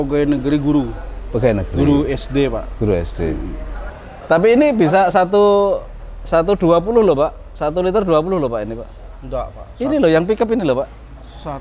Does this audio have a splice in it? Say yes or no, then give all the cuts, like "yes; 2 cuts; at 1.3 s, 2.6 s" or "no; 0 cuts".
yes; 1 cut; at 3.9 s